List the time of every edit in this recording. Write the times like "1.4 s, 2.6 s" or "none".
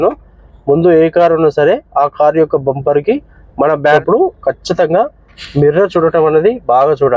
4.0 s